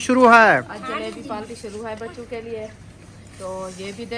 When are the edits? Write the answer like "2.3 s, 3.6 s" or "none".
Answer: none